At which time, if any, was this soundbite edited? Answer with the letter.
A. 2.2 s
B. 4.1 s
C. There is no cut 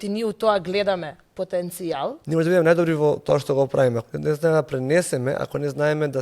A